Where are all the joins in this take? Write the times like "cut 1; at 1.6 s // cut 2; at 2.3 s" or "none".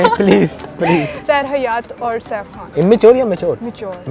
cut 1; at 1.1 s // cut 2; at 2.6 s